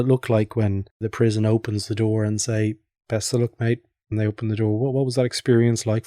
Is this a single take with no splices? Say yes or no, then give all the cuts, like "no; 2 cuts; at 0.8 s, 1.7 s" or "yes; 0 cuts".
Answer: no; 1 cut; at 1.1 s